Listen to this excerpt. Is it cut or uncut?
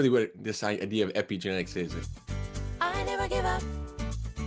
cut